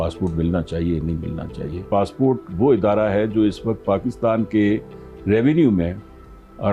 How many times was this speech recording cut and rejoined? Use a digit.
1